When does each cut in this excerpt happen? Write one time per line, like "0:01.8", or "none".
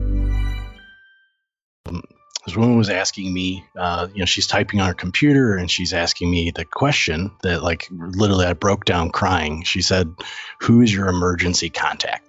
0:01.9